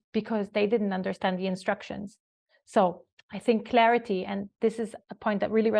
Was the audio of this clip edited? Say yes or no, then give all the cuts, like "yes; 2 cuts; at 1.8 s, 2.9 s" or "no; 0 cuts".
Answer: no; 0 cuts